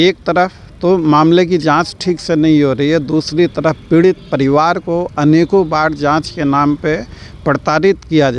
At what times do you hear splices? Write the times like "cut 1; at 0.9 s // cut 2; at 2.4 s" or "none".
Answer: none